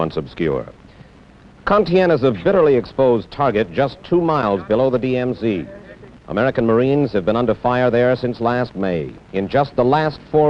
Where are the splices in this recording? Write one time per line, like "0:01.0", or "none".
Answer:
none